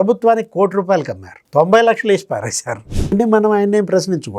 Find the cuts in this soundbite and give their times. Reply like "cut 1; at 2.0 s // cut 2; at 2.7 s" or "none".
cut 1; at 2.8 s